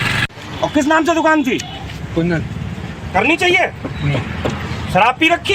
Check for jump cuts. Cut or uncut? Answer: cut